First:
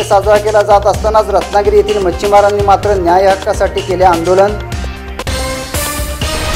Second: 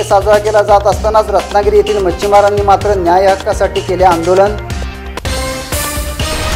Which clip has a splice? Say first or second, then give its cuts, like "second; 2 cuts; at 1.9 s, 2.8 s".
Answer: first; 1 cut; at 5.1 s